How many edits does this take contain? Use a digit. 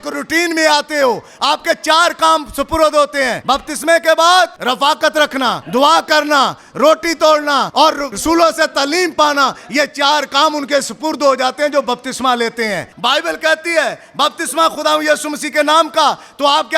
5